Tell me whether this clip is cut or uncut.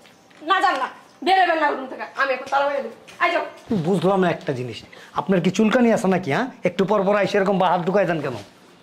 cut